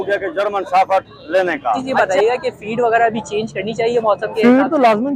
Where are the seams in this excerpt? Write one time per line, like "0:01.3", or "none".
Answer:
0:01.9